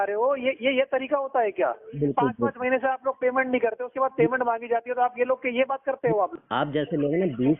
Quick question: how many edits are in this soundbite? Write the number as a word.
one